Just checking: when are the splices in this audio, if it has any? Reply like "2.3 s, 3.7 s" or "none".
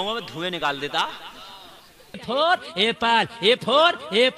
2.2 s